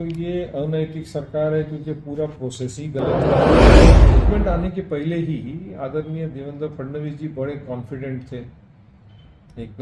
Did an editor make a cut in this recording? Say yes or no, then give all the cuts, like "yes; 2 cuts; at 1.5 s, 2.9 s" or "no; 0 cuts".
yes; 2 cuts; at 3.0 s, 4.1 s